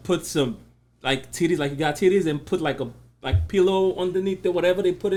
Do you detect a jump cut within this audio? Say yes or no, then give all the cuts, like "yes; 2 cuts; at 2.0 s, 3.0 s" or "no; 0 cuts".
no; 0 cuts